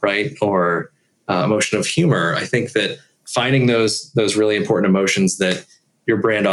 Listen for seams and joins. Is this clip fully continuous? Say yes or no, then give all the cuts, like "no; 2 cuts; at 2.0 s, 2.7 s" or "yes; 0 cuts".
yes; 0 cuts